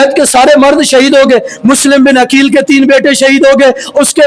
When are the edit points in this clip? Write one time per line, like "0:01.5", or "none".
none